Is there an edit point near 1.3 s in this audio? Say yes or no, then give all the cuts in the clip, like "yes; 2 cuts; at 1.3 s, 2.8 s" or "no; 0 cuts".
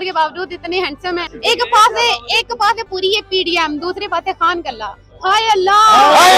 yes; 1 cut; at 1.3 s